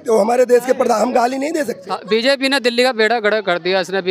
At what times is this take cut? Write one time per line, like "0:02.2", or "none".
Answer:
0:01.9